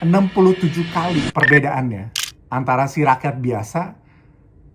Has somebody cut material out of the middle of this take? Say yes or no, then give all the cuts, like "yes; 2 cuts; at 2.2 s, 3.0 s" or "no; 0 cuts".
yes; 1 cut; at 1.3 s